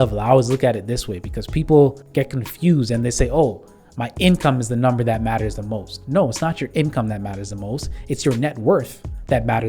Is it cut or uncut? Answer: cut